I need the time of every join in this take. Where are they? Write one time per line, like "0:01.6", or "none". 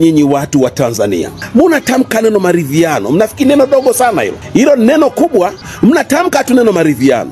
0:01.4
0:04.4
0:05.6